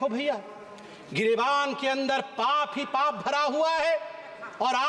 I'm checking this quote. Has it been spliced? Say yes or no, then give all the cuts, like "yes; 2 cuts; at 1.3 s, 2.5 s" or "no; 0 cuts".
no; 0 cuts